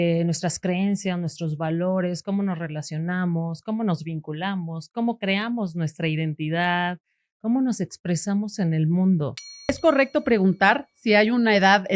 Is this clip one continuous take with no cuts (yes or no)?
no